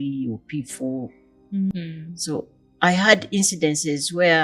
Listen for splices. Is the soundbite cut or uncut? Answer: cut